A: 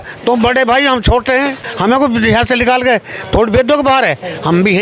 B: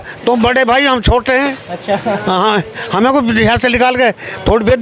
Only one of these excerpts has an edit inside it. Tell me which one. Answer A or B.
A